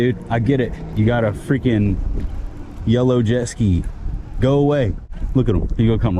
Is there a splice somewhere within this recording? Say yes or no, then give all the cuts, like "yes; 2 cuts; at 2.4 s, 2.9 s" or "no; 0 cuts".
no; 0 cuts